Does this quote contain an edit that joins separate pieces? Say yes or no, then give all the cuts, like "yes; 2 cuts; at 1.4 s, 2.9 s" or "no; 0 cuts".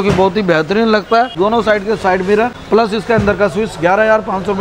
yes; 2 cuts; at 1.3 s, 2.6 s